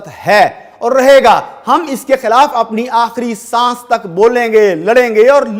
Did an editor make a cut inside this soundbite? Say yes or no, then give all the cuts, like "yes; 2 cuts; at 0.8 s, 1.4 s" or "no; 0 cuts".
no; 0 cuts